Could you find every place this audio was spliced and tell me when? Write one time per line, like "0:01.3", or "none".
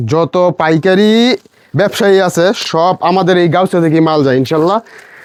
none